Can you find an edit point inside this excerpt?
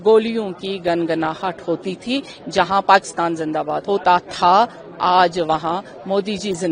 yes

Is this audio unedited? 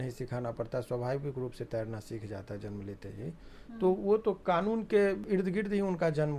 no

